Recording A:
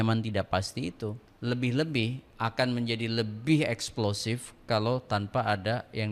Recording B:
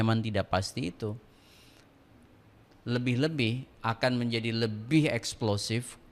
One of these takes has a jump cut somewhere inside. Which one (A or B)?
A